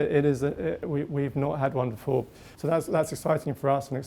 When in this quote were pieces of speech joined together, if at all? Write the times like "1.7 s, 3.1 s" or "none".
2.4 s